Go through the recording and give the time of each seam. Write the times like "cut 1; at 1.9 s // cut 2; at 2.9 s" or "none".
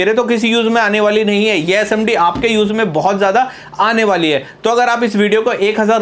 none